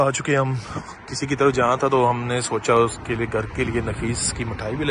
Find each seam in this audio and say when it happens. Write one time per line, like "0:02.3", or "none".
none

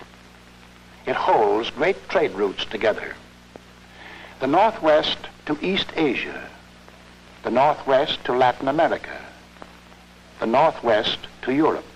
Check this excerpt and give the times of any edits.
none

